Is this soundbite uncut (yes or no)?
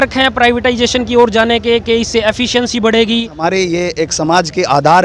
no